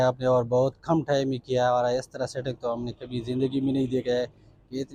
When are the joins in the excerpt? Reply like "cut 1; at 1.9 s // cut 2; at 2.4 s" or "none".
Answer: none